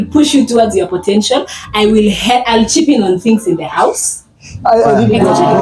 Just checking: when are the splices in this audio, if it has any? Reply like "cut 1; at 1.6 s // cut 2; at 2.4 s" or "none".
none